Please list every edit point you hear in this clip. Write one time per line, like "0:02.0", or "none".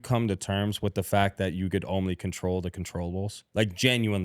none